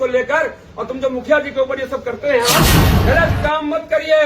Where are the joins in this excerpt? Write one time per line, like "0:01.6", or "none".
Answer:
0:02.8